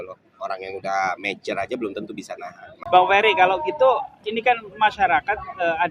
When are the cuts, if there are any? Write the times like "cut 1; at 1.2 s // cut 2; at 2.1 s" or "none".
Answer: cut 1; at 2.7 s